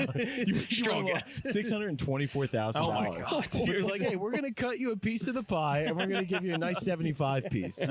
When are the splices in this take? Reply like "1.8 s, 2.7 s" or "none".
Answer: none